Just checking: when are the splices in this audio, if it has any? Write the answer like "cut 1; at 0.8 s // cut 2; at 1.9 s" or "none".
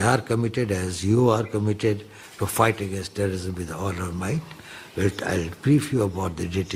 none